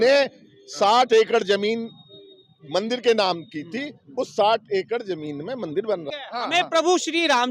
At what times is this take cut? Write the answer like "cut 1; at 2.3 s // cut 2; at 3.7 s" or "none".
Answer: cut 1; at 6.2 s